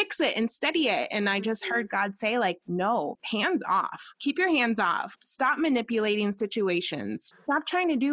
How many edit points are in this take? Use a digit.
3